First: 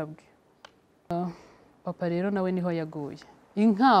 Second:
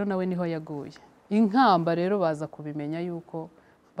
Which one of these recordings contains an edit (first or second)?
first